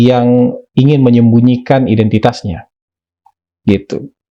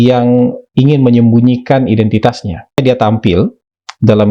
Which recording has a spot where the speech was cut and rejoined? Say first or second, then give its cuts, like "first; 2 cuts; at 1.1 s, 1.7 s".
second; 1 cut; at 2.8 s